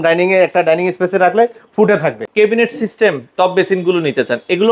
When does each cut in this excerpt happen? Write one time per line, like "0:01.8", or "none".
0:02.2